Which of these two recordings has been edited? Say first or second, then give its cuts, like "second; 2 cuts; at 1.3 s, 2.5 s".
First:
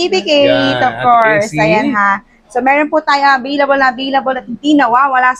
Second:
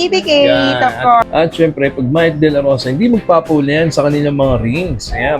second; 1 cut; at 1.2 s